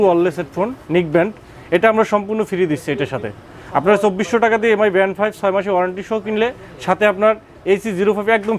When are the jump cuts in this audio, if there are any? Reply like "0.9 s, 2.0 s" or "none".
none

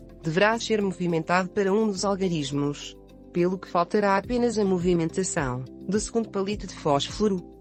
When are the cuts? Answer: none

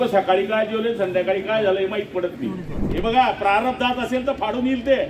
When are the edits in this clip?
2.9 s

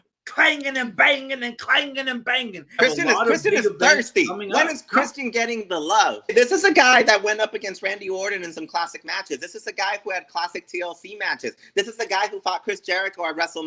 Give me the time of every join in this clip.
2.8 s, 6.3 s

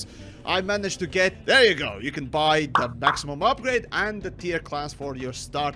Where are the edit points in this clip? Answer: 1.4 s

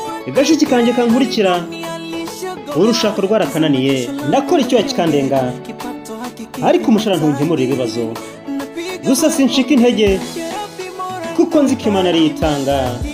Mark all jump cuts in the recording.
4.2 s

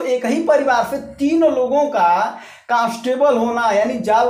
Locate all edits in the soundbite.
none

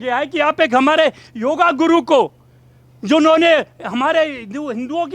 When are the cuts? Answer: none

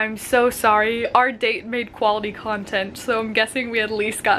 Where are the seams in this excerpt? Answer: none

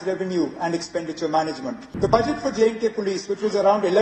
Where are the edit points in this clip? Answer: 1.8 s

